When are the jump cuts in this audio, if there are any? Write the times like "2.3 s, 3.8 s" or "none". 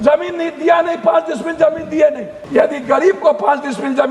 2.3 s